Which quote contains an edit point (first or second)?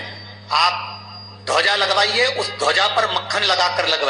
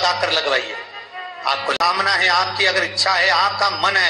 second